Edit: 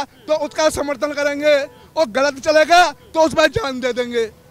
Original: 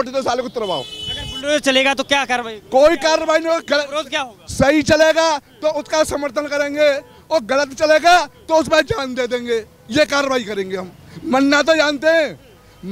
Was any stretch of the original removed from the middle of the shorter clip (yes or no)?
no